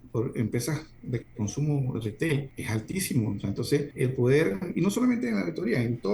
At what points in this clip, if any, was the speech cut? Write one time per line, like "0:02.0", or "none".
0:02.6
0:03.9